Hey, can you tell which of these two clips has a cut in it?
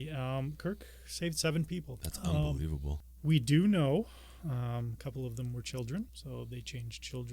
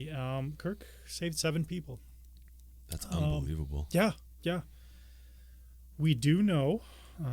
first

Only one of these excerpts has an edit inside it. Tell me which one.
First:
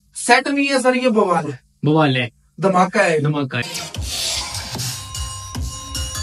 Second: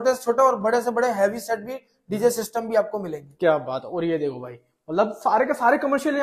first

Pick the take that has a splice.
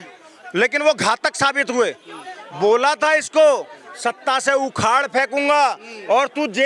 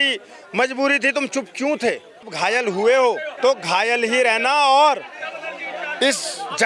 second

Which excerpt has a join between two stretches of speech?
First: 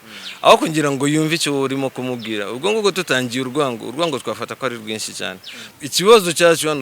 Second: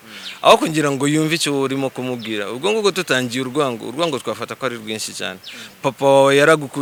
first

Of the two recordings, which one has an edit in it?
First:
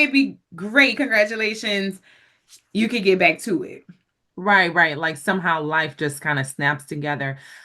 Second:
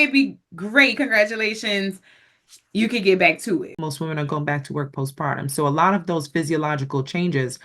second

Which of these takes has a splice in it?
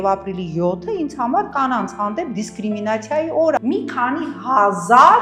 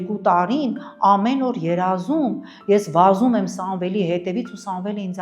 first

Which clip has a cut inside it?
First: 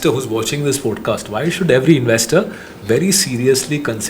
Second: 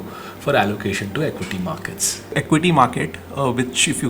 second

